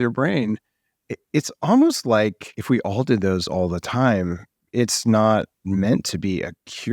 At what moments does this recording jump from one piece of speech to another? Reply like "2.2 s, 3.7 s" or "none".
2.5 s